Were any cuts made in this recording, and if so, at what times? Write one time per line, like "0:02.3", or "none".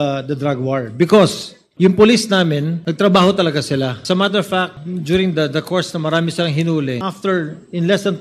0:01.6
0:02.8
0:04.0
0:04.9
0:07.1